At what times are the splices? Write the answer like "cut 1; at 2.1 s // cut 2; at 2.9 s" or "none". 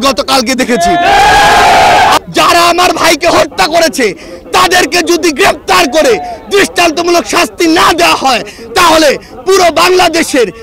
cut 1; at 2.2 s